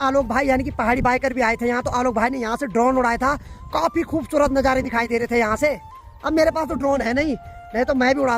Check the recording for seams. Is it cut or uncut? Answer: uncut